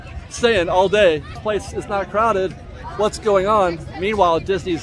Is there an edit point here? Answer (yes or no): yes